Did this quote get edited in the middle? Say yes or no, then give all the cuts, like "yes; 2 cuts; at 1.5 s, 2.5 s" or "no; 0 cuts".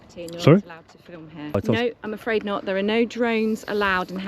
yes; 1 cut; at 1.6 s